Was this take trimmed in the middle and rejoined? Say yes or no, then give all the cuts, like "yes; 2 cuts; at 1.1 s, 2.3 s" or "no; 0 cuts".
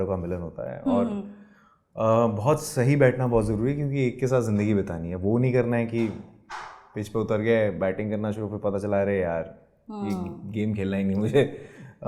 no; 0 cuts